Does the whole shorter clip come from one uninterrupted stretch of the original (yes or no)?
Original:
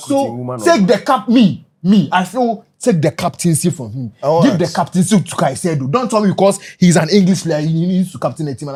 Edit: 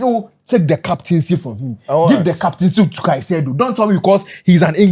yes